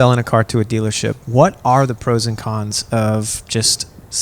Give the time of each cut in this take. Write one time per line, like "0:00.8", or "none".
0:01.1